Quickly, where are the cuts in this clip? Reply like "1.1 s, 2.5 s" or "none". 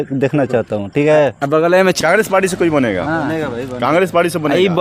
2.0 s